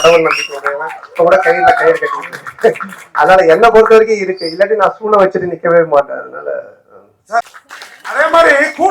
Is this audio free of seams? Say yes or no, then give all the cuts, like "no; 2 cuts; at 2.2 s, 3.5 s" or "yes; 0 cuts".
no; 1 cut; at 7.5 s